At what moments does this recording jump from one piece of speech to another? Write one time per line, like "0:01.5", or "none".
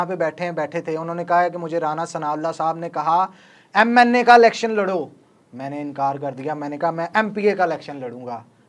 none

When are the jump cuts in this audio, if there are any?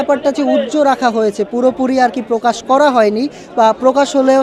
none

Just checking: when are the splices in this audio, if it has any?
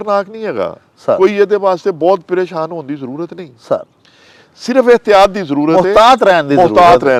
none

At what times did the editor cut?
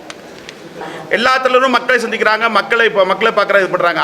0:00.9

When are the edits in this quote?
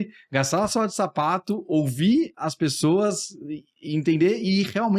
none

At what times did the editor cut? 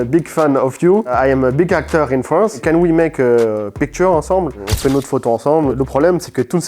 0:02.6
0:05.8

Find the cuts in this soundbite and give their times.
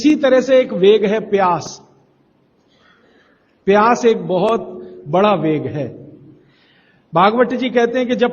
0:01.6

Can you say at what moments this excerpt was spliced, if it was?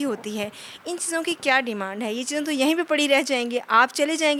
none

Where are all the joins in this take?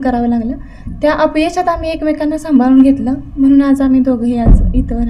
none

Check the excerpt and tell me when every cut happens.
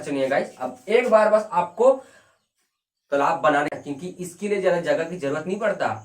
0:03.8

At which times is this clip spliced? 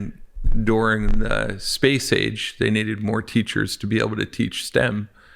none

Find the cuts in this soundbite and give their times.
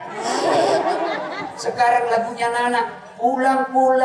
none

